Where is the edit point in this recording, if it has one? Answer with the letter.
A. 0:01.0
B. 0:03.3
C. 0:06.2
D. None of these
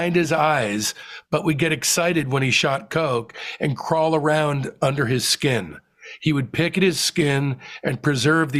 D